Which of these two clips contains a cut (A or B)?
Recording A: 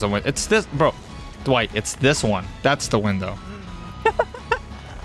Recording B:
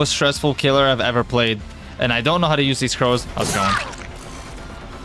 B